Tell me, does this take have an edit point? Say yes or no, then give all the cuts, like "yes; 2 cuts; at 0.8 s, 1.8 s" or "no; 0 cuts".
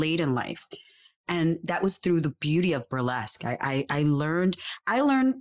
no; 0 cuts